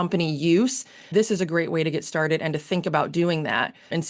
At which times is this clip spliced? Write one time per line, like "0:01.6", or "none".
0:01.1